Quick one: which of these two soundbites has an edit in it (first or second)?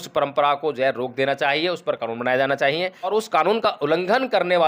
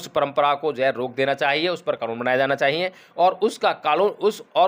first